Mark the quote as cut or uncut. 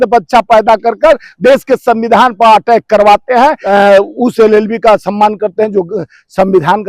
cut